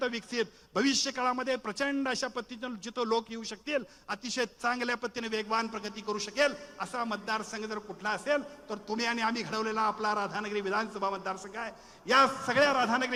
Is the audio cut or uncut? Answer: uncut